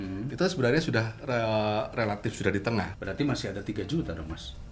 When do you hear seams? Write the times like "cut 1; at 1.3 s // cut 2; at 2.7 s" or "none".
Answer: cut 1; at 2.9 s